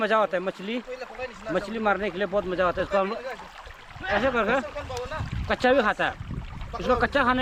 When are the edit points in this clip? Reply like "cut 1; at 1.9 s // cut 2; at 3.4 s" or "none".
none